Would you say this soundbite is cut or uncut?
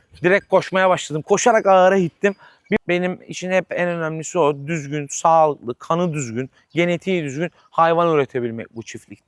cut